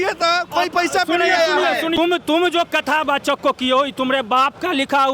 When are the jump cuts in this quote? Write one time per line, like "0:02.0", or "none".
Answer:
0:02.0

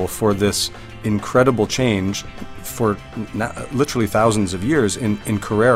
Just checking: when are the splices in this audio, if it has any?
none

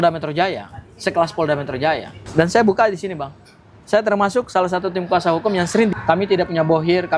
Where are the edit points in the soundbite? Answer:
0:02.2
0:05.9

